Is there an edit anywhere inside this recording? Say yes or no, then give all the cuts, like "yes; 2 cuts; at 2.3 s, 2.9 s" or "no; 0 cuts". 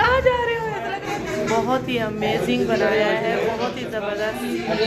yes; 1 cut; at 1.0 s